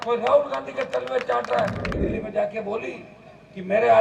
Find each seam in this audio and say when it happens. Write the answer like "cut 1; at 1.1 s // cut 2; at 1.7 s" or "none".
cut 1; at 1.9 s